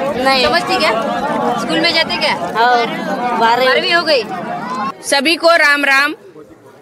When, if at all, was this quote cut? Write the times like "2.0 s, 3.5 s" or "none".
5.0 s